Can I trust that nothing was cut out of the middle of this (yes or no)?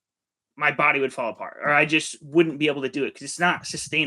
yes